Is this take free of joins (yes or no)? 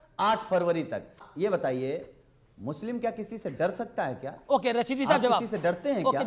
no